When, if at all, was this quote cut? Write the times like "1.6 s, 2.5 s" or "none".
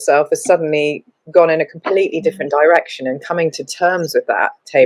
none